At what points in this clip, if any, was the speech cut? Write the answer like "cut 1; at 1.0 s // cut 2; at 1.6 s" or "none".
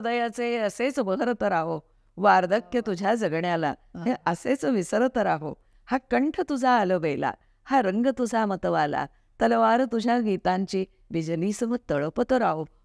none